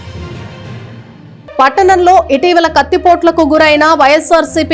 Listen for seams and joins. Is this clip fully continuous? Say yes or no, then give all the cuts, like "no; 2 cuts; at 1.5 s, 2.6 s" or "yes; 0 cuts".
no; 1 cut; at 1.3 s